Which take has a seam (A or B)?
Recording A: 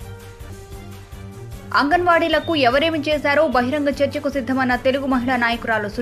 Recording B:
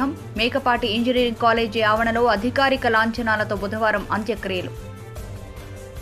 A